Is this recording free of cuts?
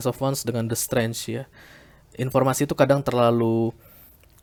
yes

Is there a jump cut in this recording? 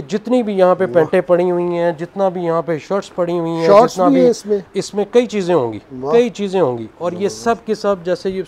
no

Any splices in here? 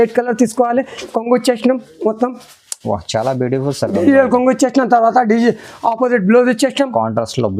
yes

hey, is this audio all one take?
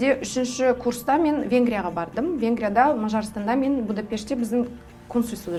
yes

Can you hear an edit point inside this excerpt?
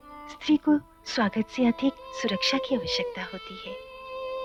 no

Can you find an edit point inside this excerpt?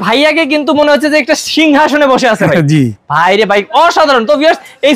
no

